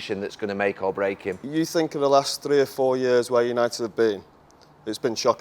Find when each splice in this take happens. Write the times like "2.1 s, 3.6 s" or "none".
1.4 s